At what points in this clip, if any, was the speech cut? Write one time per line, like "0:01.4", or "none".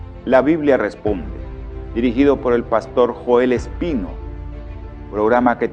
none

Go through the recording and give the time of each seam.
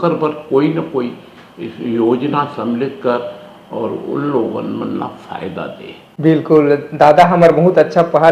none

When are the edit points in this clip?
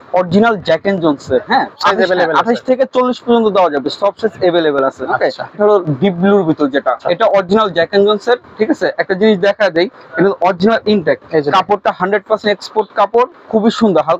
0:01.8
0:05.5
0:07.0
0:11.2

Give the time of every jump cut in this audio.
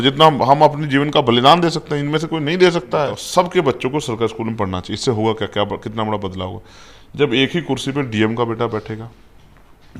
0:03.2

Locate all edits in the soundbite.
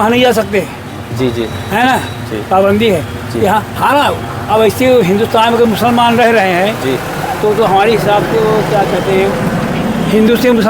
none

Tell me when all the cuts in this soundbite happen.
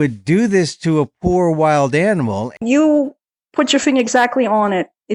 0:02.6

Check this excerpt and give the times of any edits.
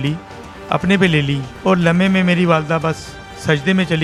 none

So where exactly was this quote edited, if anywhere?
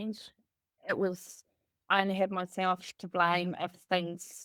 none

